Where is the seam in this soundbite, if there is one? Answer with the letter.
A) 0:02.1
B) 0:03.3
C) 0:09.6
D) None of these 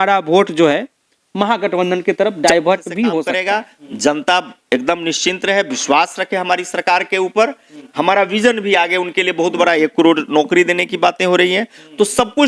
B